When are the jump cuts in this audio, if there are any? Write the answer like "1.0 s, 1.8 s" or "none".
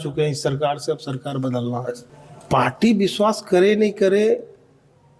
2.0 s